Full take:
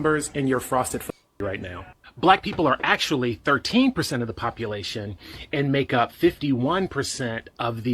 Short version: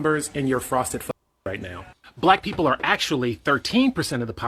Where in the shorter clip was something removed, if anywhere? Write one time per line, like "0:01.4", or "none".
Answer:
none